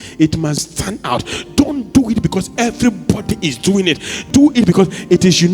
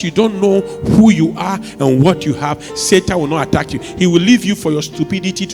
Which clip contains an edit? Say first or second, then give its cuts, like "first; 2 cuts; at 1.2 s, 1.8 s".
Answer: first; 1 cut; at 4.3 s